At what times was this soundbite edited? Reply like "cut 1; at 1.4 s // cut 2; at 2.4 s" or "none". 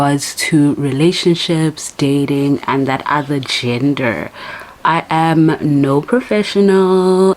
none